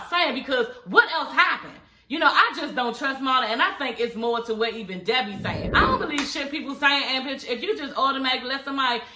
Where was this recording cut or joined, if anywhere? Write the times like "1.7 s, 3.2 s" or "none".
5.6 s

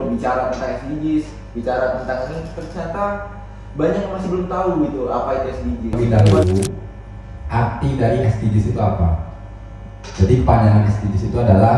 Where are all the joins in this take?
6.0 s

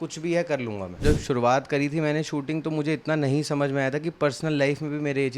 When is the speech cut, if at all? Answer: 1.0 s

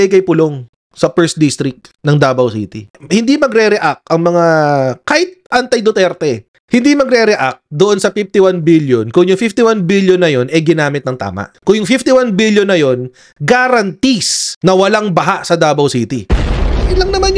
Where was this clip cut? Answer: none

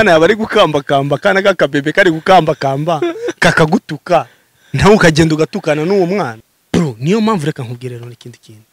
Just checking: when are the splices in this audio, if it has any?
6.3 s

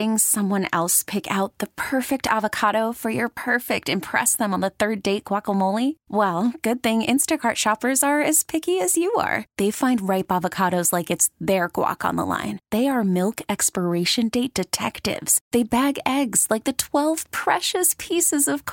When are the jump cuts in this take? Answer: none

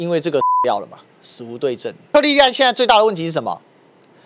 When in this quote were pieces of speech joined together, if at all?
2.1 s

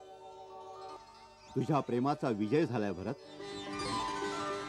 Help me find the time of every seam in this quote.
1.0 s, 3.5 s

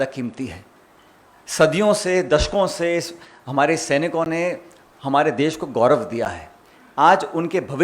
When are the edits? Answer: none

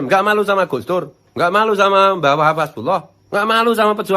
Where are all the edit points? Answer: 1.2 s, 3.2 s

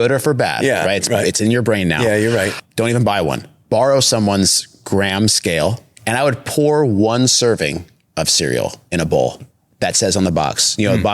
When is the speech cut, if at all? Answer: 2.6 s, 5.9 s

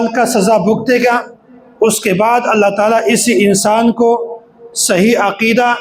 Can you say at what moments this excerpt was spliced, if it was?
none

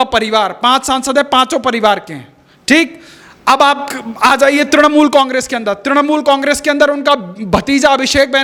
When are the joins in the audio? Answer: none

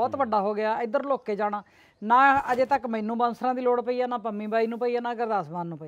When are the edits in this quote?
none

